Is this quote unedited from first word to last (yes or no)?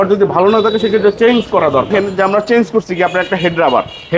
no